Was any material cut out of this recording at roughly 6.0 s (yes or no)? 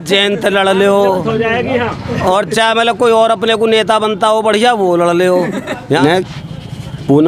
yes